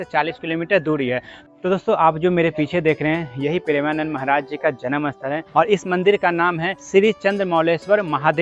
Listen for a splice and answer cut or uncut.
cut